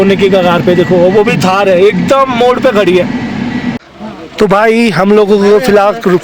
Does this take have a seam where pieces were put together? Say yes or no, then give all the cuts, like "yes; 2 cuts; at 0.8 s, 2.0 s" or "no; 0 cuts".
yes; 1 cut; at 3.8 s